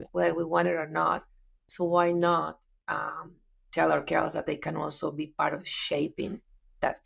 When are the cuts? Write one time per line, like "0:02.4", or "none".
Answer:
none